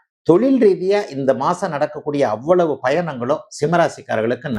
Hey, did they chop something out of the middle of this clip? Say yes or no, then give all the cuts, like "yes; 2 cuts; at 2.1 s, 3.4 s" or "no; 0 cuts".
no; 0 cuts